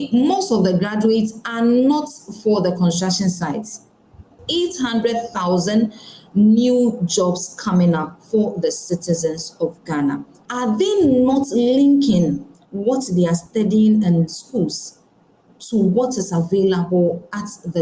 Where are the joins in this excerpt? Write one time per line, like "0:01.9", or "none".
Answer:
0:04.4
0:10.4